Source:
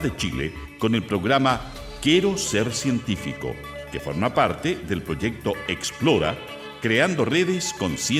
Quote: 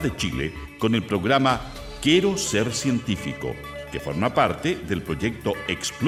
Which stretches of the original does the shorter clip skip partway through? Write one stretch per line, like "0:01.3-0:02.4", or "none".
none

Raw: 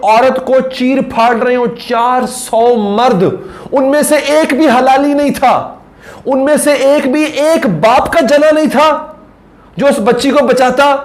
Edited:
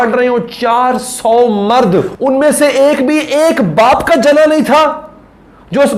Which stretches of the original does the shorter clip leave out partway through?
0:03.4-0:06.2

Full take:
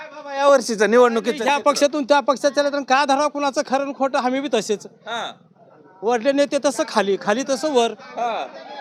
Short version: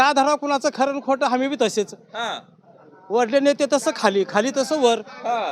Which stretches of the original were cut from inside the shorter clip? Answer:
none

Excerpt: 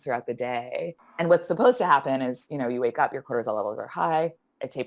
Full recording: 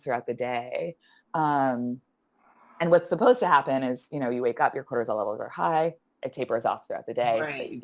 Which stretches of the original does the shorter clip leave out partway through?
0:01.0-0:02.6

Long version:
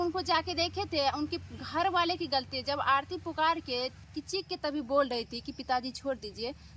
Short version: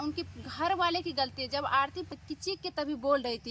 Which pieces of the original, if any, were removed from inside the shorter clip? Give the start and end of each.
0:03.3-0:04.0

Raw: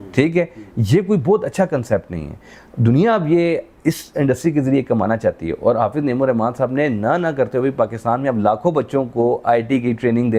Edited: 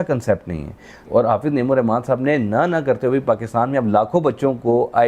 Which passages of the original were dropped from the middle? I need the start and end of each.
0:02.6-0:05.5

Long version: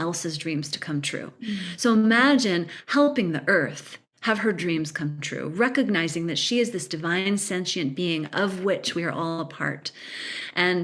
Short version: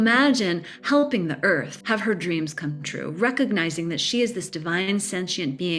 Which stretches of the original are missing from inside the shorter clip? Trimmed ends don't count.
0:03.8-0:04.1

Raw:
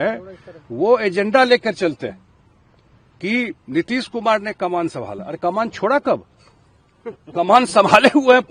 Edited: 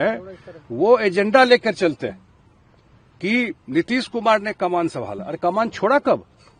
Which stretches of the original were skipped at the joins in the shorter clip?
none

